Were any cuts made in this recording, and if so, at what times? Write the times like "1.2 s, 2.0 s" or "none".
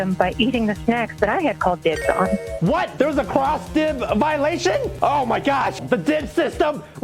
2.7 s, 4.9 s, 5.8 s

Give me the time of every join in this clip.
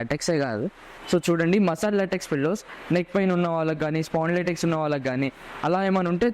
0.9 s, 2.7 s

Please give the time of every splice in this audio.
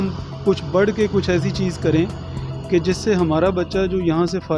none

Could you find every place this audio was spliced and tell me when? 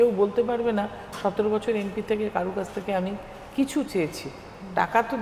none

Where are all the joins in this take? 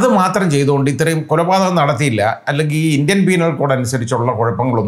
none

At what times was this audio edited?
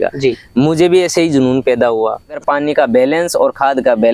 2.4 s

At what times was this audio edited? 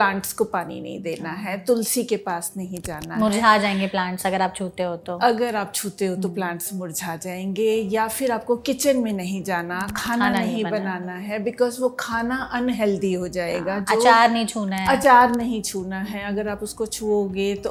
none

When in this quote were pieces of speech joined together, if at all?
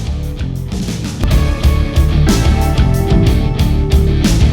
1.2 s

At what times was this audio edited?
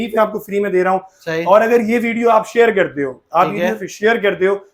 none

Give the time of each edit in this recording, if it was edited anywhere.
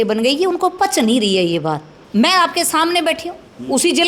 2.0 s

